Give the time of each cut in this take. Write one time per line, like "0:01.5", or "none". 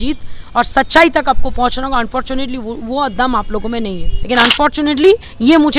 0:04.1